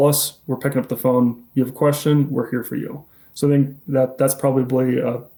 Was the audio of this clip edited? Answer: no; 0 cuts

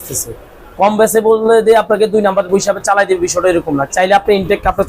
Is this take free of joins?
no; 1 cut; at 3.9 s

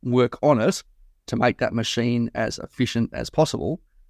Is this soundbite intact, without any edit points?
yes; 0 cuts

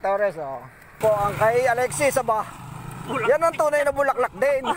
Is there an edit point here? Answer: yes; 1 cut; at 1.0 s

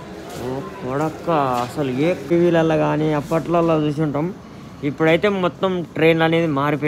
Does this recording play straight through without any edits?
no; 1 cut; at 2.3 s

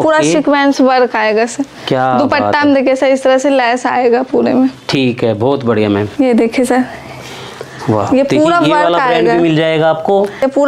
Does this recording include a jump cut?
no; 0 cuts

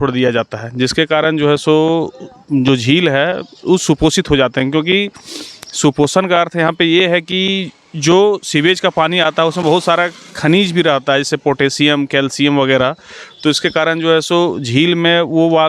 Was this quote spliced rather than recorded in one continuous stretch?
no; 0 cuts

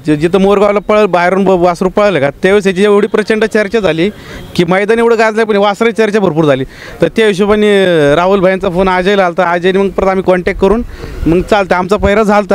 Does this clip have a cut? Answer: no; 0 cuts

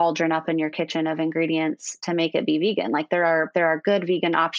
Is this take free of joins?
yes; 0 cuts

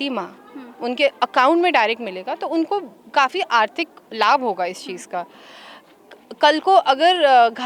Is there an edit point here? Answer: no; 0 cuts

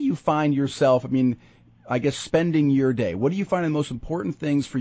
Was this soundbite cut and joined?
no; 0 cuts

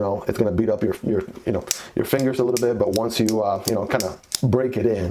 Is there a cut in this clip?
no; 0 cuts

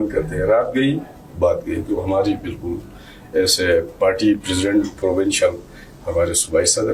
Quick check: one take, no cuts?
yes; 0 cuts

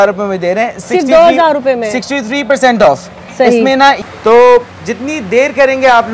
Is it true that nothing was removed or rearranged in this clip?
no; 1 cut; at 4.0 s

